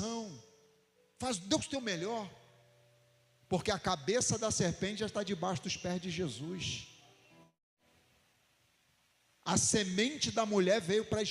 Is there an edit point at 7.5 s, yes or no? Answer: yes